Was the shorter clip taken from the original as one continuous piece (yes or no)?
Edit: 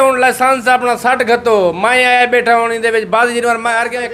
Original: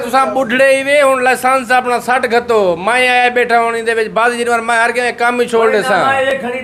yes